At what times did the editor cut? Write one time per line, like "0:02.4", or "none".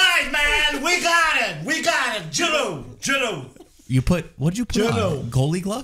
none

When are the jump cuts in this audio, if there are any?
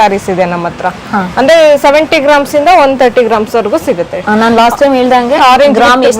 none

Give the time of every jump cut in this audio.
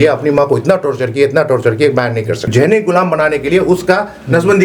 0:02.5

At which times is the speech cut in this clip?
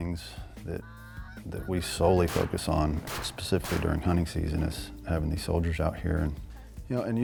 none

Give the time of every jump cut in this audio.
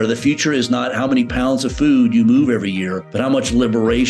0:03.0

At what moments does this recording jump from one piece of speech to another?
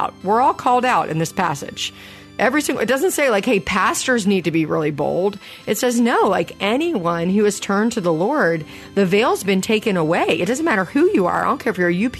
none

